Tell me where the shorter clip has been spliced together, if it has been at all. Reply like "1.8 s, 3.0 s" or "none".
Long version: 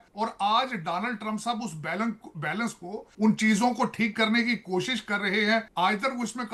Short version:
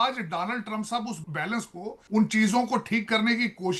1.2 s